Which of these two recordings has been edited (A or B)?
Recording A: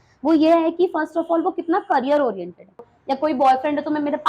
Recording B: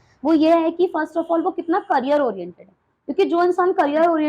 A